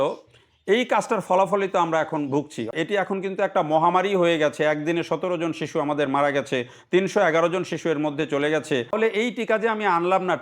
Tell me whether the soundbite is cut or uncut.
cut